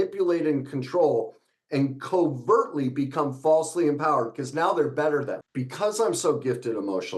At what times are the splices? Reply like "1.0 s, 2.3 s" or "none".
5.5 s